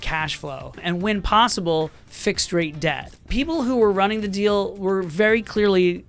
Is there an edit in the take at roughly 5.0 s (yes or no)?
no